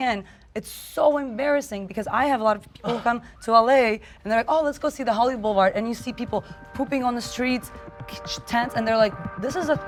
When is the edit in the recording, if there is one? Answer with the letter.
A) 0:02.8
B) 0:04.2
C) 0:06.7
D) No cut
D